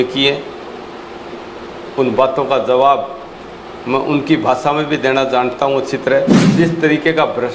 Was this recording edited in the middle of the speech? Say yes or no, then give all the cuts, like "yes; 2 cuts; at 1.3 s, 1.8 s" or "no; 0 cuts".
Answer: yes; 1 cut; at 6.5 s